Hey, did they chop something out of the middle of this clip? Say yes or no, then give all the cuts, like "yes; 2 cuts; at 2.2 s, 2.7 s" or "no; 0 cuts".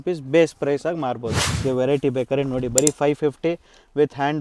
yes; 1 cut; at 1.5 s